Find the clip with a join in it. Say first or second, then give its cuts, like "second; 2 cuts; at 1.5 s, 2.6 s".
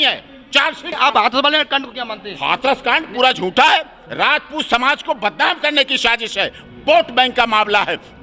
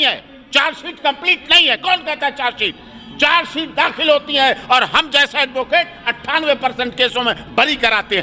first; 1 cut; at 0.9 s